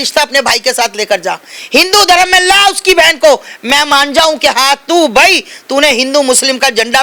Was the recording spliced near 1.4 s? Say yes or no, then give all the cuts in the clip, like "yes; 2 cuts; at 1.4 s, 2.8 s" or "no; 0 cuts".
no; 0 cuts